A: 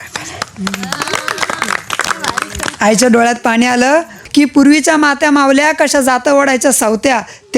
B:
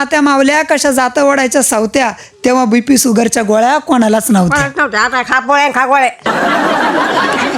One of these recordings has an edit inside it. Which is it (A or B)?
A